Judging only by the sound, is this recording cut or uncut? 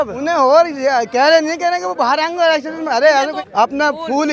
cut